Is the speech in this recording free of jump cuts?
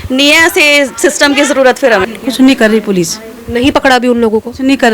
no; 1 cut; at 2.0 s

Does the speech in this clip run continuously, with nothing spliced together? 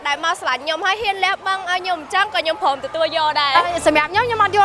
no; 1 cut; at 3.6 s

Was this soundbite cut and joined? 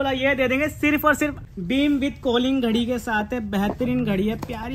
yes; 1 cut; at 1.4 s

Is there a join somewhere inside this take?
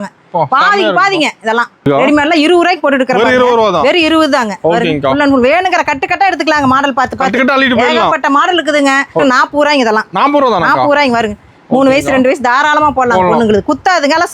yes; 2 cuts; at 1.9 s, 9.2 s

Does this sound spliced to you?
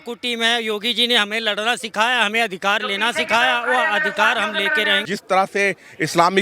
yes; 1 cut; at 5.0 s

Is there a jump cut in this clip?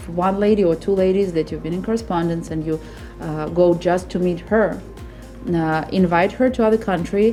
no; 0 cuts

